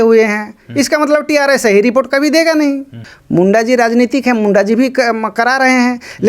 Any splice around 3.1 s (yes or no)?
yes